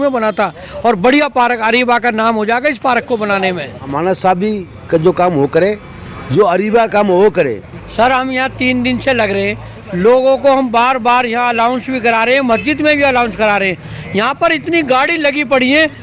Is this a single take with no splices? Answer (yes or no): no